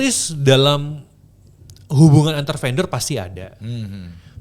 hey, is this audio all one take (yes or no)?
yes